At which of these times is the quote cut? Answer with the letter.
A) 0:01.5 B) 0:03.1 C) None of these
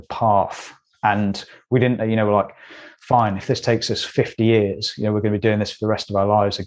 C